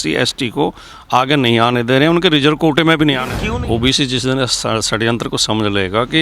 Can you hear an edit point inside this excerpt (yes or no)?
yes